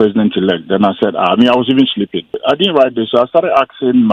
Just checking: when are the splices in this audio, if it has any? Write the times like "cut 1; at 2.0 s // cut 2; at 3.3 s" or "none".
cut 1; at 2.4 s